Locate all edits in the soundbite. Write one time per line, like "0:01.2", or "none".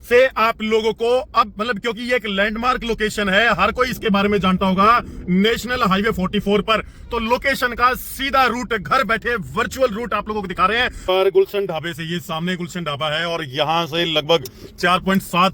0:11.0